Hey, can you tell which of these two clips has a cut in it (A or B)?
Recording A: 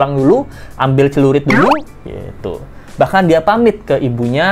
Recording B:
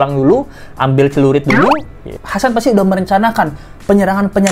B